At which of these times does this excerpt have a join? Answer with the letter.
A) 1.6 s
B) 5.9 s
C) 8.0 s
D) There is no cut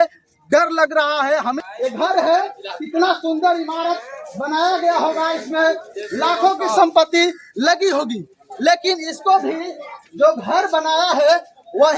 A